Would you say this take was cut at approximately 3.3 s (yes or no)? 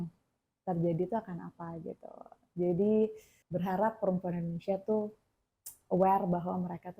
yes